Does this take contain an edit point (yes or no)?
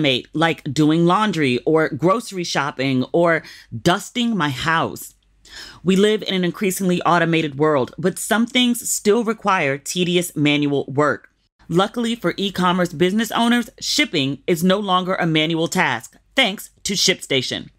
no